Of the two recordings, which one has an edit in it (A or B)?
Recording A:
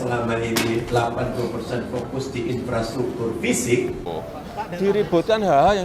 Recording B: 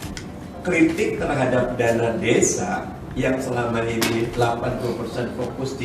A